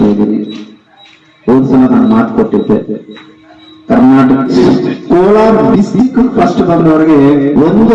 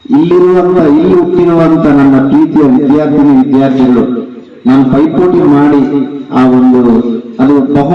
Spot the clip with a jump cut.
first; 1 cut; at 4.5 s

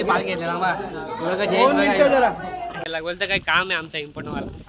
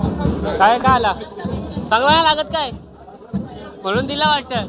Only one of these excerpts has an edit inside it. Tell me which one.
first; 1 cut; at 2.8 s

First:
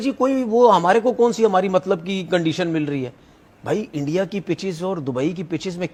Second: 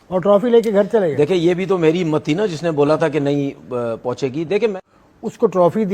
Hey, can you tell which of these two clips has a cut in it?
second; 2 cuts; at 1.4 s, 4.8 s

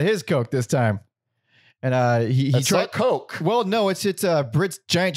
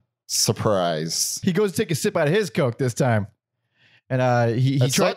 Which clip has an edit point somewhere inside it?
second; 1 cut; at 1.3 s

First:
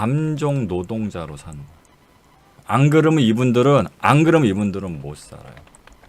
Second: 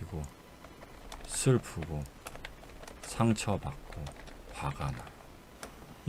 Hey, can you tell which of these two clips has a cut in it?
first; 1 cut; at 2.5 s

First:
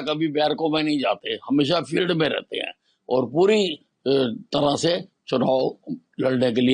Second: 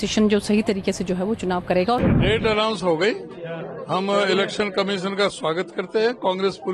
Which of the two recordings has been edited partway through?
second; 1 cut; at 2.0 s

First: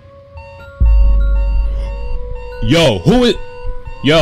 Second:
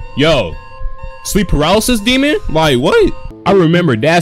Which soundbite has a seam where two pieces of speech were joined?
second; 1 cut; at 3.3 s

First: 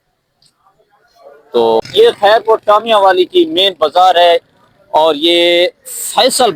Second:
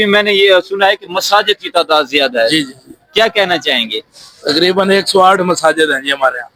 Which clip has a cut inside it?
first; 1 cut; at 1.8 s

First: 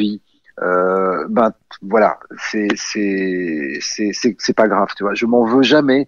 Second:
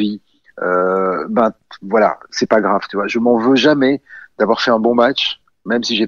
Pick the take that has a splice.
second; 1 cut; at 2.3 s

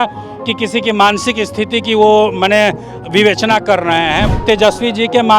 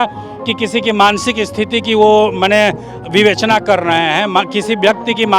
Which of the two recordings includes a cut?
first; 1 cut; at 4.2 s

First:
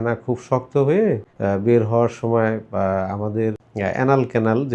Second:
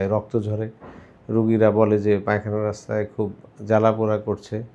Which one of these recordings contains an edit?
first; 2 cuts; at 1.3 s, 3.6 s

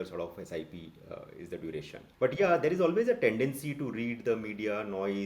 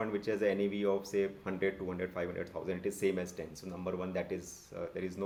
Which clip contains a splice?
first; 1 cut; at 2.0 s

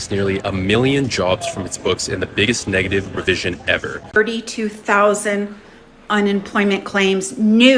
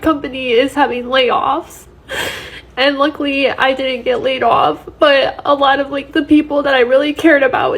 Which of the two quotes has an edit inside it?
first; 1 cut; at 4.2 s

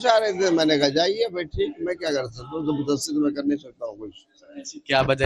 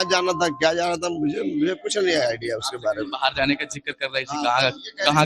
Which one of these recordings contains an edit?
first; 1 cut; at 2.1 s

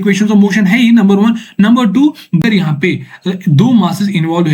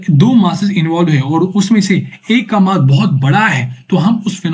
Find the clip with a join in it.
first; 1 cut; at 2.4 s

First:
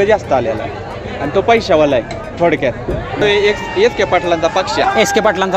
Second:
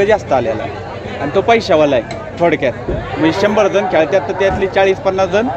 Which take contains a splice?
first; 1 cut; at 3.2 s

